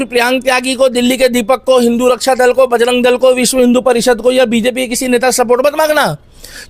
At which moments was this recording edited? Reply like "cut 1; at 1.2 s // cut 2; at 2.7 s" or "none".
none